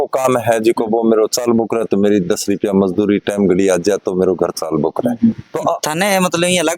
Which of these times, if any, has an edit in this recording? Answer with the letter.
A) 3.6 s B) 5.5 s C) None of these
B